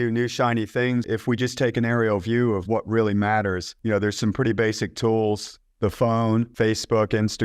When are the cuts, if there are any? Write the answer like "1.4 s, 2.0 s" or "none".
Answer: 1.1 s, 3.7 s, 6.5 s